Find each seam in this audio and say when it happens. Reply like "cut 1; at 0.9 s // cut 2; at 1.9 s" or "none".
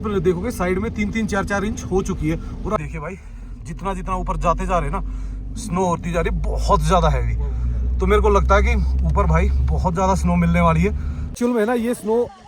cut 1; at 2.8 s // cut 2; at 11.2 s